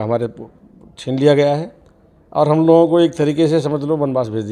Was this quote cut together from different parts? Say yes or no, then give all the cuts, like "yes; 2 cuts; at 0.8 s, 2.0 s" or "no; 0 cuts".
no; 0 cuts